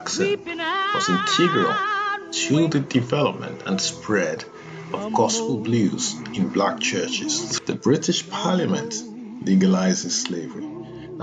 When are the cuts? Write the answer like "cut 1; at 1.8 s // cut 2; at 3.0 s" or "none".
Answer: cut 1; at 7.5 s